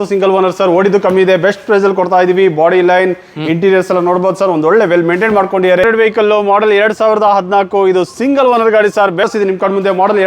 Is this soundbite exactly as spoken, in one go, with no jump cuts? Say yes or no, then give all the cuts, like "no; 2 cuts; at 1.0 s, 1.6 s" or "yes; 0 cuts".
no; 2 cuts; at 5.8 s, 9.3 s